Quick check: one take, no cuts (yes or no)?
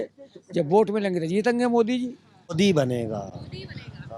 no